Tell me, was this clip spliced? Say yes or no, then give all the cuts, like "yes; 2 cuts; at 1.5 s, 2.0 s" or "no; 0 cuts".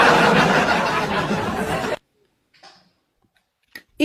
no; 0 cuts